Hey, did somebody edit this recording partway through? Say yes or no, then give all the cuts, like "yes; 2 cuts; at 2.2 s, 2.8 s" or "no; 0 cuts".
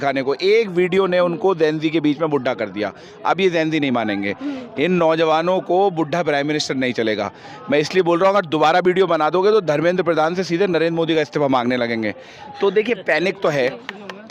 no; 0 cuts